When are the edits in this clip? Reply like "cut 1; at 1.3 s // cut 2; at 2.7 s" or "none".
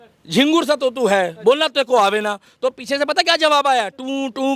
none

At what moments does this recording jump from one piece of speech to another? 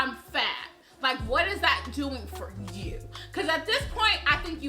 none

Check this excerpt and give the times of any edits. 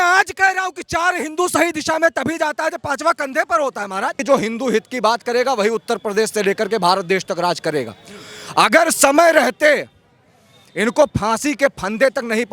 cut 1; at 4.2 s

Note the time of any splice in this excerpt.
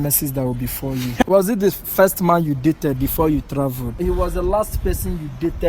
cut 1; at 1.2 s // cut 2; at 4.0 s

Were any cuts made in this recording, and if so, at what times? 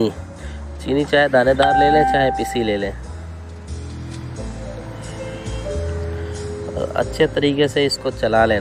cut 1; at 3.0 s // cut 2; at 6.7 s

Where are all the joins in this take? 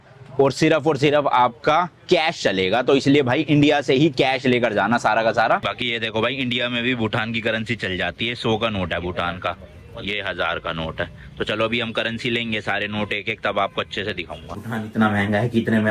cut 1; at 5.7 s // cut 2; at 14.6 s

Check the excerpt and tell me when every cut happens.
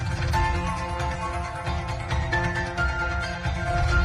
none

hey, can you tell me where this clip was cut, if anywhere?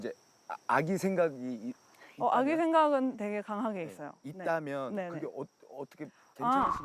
none

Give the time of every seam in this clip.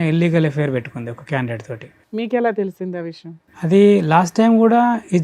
none

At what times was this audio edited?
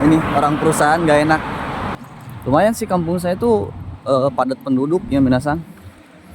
cut 1; at 1.9 s

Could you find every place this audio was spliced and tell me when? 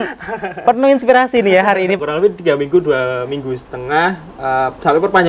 cut 1; at 2.0 s

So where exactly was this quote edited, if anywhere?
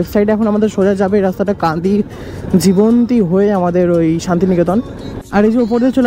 cut 1; at 4.8 s

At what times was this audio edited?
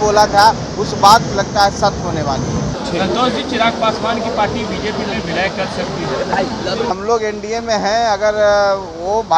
cut 1; at 2.7 s // cut 2; at 6.9 s

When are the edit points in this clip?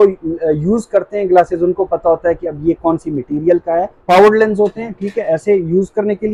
cut 1; at 4.0 s

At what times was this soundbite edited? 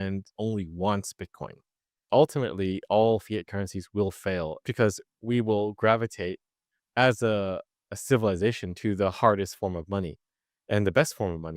cut 1; at 2.1 s

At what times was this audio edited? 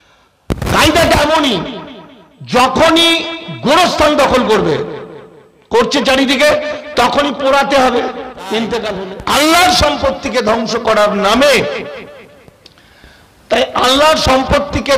cut 1; at 8.9 s

